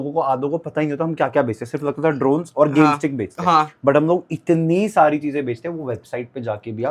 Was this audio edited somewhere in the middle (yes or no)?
no